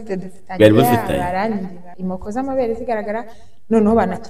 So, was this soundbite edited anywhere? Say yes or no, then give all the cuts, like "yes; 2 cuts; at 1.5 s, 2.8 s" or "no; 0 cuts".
yes; 1 cut; at 1.8 s